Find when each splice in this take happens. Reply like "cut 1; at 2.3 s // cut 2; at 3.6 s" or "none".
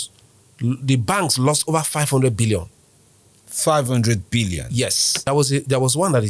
cut 1; at 5.1 s